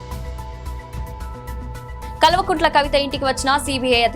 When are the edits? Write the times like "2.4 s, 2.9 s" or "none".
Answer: 1.1 s